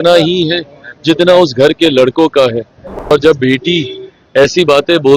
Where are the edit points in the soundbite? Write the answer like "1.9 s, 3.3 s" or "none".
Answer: 3.1 s

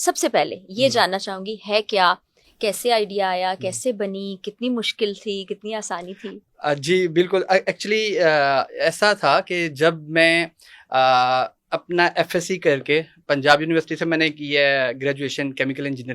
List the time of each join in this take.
none

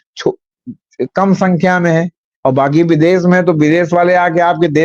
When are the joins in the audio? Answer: none

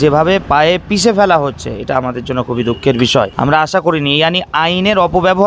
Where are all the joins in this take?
none

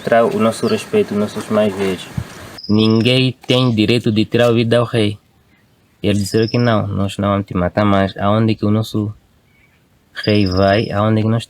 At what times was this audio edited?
2.5 s

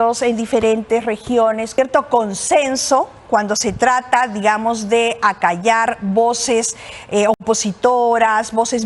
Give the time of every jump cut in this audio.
1.7 s

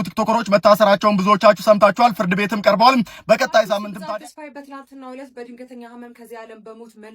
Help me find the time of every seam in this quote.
4.0 s

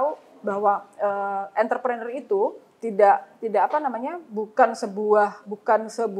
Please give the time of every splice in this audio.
none

